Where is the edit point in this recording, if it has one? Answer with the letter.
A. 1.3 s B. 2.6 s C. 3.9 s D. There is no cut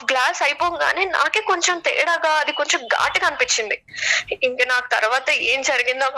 C